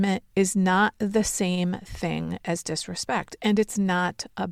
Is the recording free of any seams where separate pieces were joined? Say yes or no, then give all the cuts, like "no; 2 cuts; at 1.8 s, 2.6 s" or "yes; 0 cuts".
yes; 0 cuts